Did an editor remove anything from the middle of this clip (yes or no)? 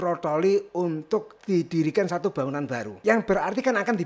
yes